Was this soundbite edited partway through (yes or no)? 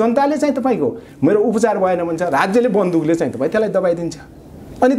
no